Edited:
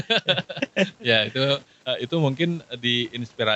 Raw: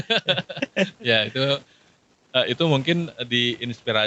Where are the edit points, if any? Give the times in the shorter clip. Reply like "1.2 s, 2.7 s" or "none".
1.7 s